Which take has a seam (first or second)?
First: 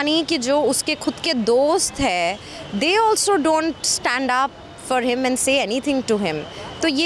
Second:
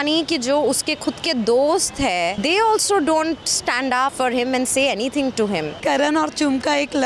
second